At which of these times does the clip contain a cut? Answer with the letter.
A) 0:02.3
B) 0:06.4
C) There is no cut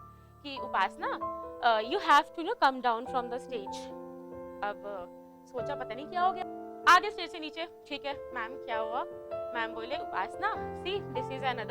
B